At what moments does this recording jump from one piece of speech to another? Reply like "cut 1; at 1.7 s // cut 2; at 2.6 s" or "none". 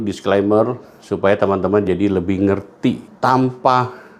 cut 1; at 3.1 s